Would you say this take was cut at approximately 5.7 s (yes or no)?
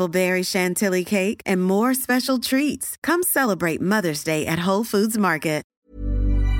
yes